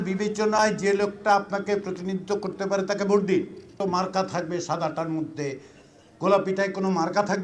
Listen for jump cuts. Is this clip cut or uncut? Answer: cut